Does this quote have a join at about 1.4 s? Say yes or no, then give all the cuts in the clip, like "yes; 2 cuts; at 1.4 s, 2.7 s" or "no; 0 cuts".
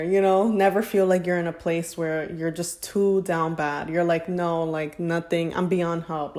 no; 0 cuts